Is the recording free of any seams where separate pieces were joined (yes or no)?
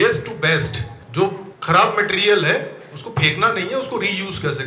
no